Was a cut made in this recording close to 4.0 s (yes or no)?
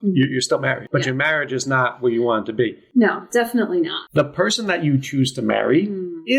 yes